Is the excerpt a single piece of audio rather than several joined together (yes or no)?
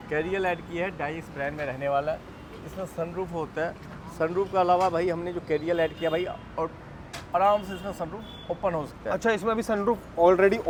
yes